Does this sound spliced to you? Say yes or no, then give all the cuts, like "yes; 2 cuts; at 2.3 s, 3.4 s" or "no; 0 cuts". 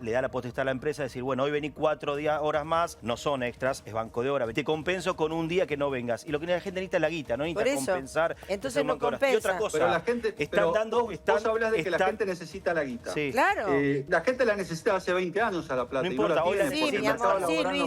yes; 3 cuts; at 3.0 s, 4.5 s, 14.0 s